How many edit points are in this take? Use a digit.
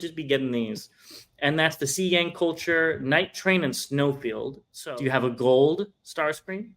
1